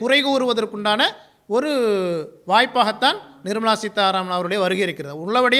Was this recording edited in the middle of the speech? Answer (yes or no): no